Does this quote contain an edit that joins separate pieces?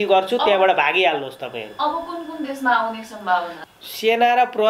yes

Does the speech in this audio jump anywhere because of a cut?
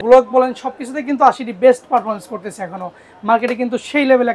no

